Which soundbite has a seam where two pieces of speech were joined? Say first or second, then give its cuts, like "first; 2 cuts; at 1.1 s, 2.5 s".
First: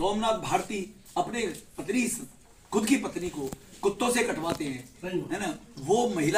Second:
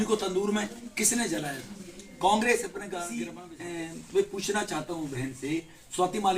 second; 1 cut; at 3.4 s